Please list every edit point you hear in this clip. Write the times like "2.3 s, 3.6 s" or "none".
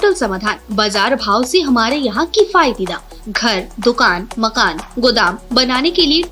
none